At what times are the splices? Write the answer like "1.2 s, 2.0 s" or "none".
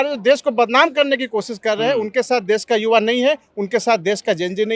none

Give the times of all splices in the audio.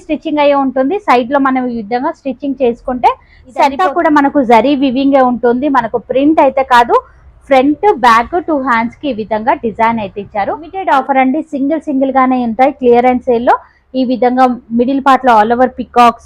3.8 s, 10.7 s

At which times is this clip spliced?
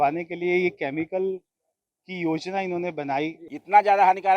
3.4 s

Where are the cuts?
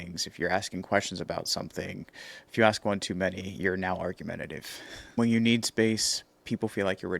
5.2 s

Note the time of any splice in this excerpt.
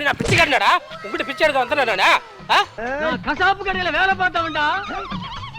2.8 s

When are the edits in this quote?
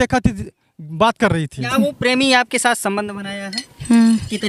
1.7 s

